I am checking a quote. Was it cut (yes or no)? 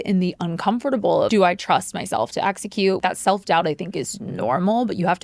yes